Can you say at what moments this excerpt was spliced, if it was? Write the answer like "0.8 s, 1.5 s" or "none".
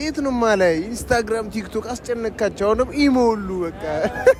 none